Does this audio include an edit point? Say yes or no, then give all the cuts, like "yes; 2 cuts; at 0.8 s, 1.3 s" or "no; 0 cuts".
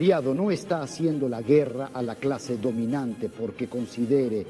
no; 0 cuts